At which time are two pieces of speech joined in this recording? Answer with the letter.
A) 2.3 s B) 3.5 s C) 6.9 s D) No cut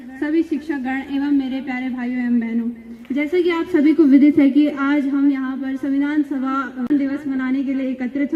C